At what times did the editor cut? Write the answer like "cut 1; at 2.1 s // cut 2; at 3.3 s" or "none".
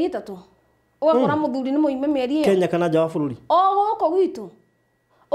none